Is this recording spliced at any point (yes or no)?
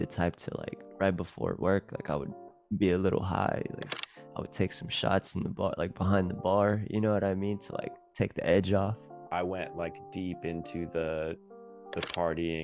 yes